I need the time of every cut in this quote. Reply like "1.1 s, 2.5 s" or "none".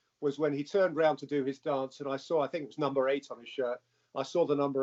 none